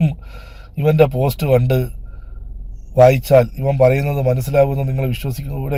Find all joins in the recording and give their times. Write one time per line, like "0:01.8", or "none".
none